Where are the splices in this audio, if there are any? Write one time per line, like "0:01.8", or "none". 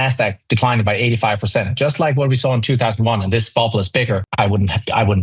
0:04.3